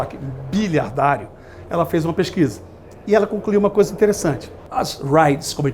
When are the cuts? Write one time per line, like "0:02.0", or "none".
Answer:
0:04.5